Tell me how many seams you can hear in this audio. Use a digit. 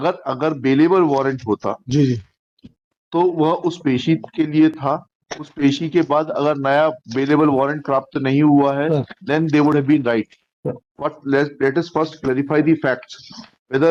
0